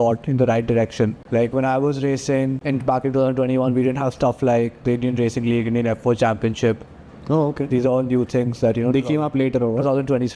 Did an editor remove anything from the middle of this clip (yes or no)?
yes